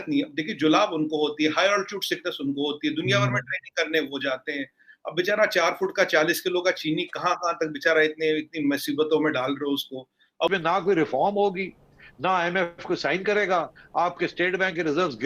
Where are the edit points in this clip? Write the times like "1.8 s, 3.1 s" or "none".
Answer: 10.5 s